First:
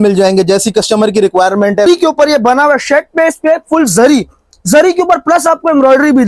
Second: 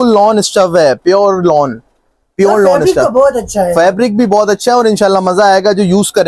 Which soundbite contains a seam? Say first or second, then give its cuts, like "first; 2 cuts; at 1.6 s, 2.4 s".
first; 1 cut; at 1.9 s